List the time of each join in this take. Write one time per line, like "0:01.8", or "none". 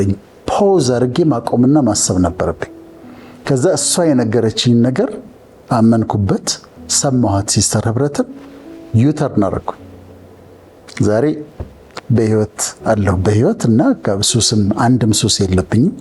none